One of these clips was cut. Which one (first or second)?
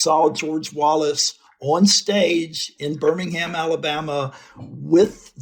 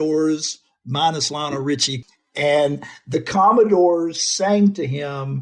second